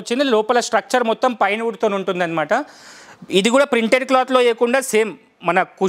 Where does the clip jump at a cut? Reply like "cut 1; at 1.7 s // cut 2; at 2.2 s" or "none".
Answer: none